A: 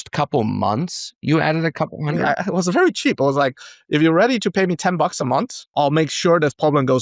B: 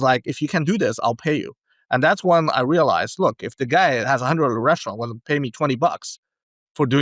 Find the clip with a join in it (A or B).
A